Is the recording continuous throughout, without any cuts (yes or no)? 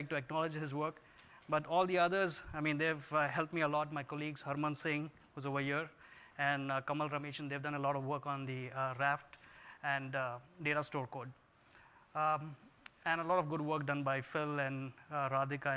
yes